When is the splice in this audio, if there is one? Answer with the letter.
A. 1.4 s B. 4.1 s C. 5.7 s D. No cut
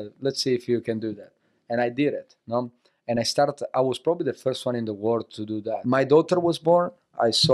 C